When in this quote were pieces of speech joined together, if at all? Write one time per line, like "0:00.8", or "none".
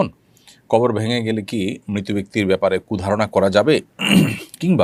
none